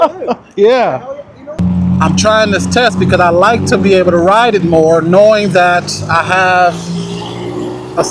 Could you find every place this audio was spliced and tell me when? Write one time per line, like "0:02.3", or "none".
0:01.6